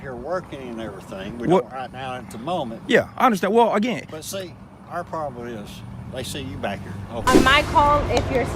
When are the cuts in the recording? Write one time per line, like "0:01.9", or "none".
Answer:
0:07.3